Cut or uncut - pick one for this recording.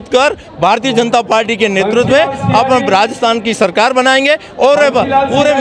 uncut